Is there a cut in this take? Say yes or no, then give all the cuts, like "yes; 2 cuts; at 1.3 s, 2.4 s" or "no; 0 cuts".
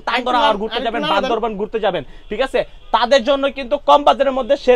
no; 0 cuts